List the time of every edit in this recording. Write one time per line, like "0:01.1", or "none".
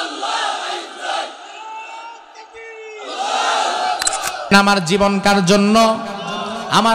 0:04.5